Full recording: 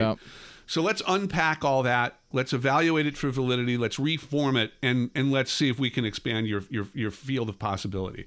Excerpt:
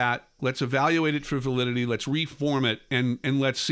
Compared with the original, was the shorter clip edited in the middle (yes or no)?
no